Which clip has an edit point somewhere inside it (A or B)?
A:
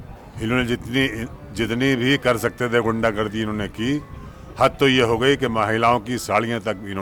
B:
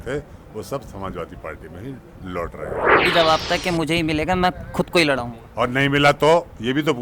B